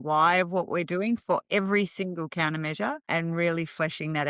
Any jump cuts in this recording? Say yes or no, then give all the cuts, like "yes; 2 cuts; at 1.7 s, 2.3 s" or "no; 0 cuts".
no; 0 cuts